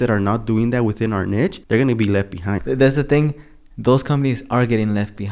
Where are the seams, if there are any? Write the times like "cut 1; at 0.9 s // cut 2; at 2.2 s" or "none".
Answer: cut 1; at 1.6 s // cut 2; at 2.6 s